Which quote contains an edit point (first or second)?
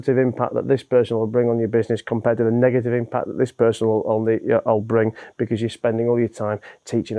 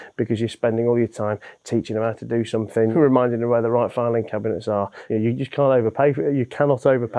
second